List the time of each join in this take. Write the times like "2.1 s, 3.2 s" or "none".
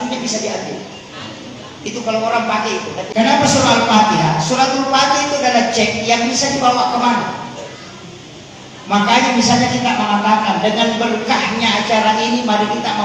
3.1 s